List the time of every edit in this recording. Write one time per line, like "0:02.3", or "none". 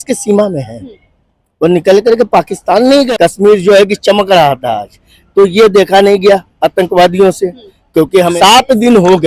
0:03.1
0:08.3